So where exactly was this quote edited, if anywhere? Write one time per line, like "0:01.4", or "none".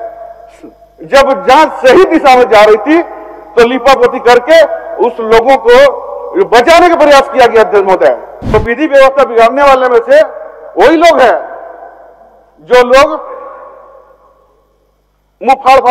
0:08.3